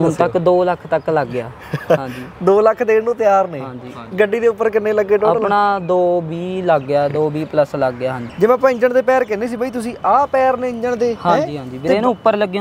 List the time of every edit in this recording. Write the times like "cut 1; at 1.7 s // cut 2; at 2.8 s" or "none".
cut 1; at 8.2 s